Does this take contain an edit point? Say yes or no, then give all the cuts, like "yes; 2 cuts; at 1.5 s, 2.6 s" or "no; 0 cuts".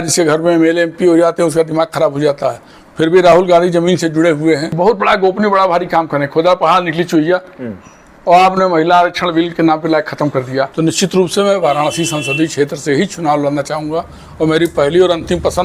yes; 2 cuts; at 4.7 s, 10.7 s